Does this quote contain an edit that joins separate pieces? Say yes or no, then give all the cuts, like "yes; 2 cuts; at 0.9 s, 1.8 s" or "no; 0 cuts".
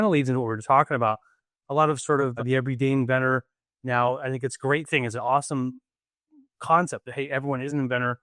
no; 0 cuts